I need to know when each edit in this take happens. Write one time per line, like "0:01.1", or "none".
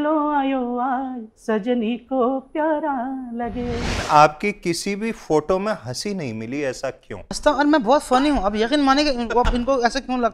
0:04.0
0:07.4